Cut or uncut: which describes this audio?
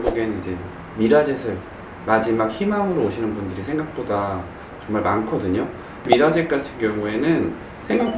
cut